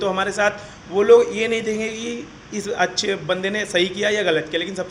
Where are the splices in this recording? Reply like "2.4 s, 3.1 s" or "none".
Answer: none

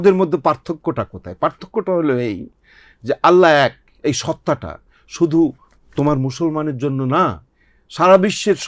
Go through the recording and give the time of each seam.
none

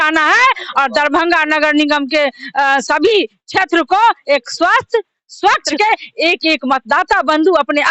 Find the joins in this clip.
5.7 s

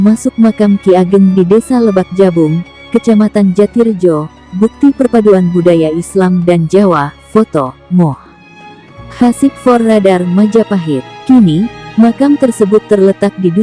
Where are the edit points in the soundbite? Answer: none

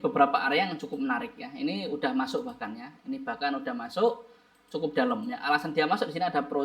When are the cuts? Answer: none

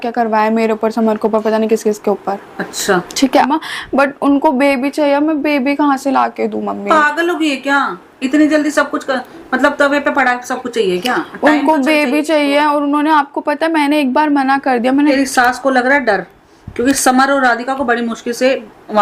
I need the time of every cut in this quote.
3.4 s, 15.1 s

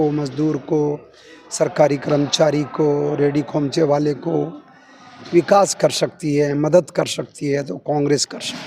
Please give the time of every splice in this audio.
none

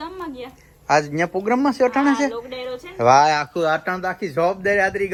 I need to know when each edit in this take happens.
none

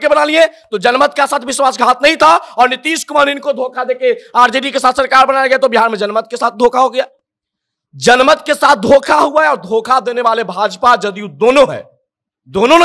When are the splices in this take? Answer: none

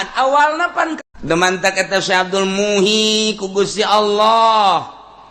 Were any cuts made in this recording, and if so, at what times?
0.9 s

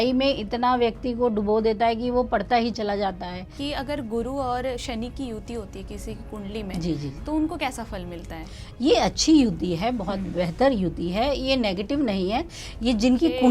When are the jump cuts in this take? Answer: 3.6 s, 12.5 s

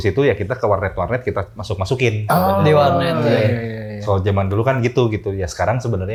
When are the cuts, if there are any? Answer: none

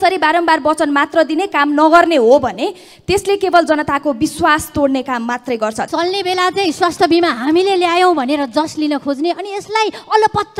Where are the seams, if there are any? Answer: 5.9 s

